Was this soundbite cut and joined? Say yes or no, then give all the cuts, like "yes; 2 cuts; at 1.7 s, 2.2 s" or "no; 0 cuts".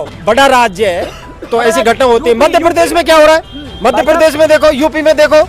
no; 0 cuts